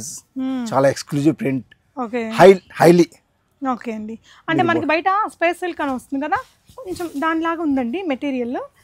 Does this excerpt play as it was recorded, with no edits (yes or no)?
yes